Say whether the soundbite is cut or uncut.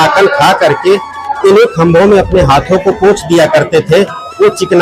uncut